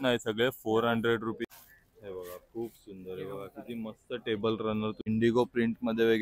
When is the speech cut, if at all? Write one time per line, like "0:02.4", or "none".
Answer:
0:01.4
0:05.1